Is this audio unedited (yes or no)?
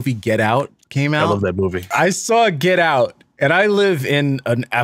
no